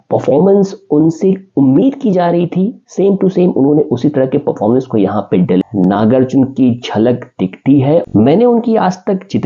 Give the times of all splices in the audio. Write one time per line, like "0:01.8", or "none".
0:05.6
0:08.1